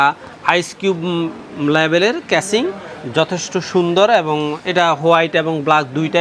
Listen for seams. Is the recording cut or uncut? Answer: uncut